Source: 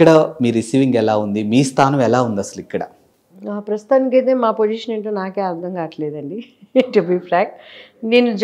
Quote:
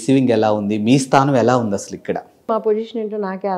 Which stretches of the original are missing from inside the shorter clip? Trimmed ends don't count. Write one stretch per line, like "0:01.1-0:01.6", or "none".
0:03.1-0:04.4